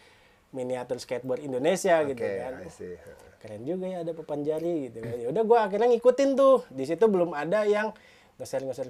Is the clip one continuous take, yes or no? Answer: yes